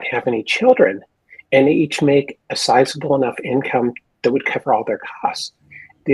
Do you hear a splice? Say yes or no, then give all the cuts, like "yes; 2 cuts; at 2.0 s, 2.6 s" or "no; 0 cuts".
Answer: no; 0 cuts